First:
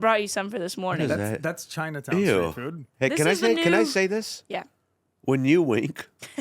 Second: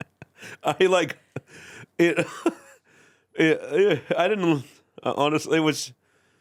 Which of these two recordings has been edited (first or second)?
first